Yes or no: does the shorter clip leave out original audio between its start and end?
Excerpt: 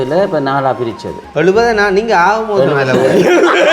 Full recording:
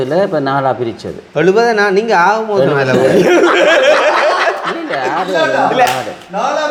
no